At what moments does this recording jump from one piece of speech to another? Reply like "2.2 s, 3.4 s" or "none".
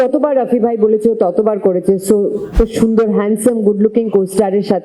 2.5 s

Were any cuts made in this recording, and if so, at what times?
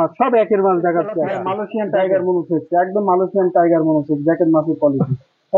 1.4 s

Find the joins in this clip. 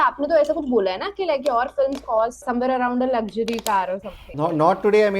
2.4 s, 4.3 s

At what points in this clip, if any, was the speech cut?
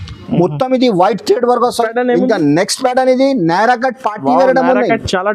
1.8 s

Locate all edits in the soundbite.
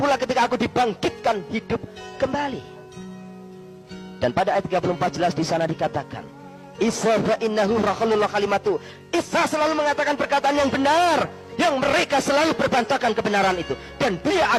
none

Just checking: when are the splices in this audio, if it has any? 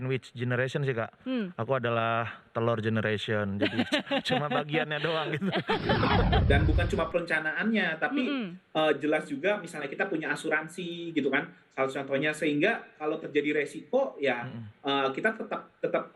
6.4 s

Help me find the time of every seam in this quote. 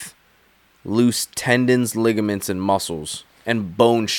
none

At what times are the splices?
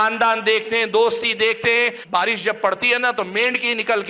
2.0 s

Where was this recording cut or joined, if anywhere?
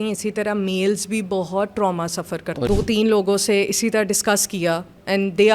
2.6 s

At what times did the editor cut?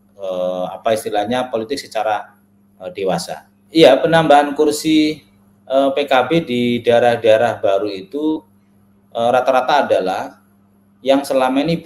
3.5 s

